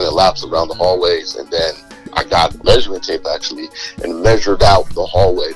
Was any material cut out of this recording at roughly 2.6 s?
yes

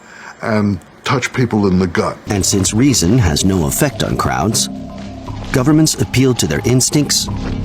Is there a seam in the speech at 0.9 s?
no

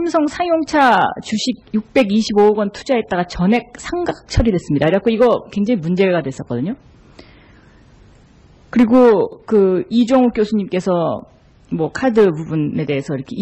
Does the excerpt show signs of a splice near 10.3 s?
yes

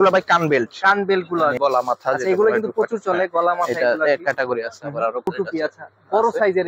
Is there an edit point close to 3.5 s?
no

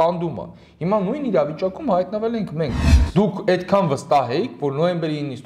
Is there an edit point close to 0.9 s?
no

